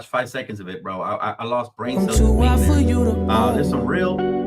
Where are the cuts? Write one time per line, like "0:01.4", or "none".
0:01.9